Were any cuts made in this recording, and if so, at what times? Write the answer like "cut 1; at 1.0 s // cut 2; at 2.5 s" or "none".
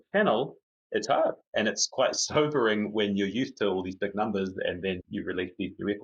cut 1; at 5.0 s